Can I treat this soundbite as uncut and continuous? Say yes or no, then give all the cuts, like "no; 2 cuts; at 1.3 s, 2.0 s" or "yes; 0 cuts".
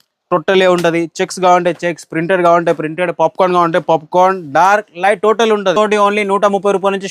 no; 1 cut; at 5.8 s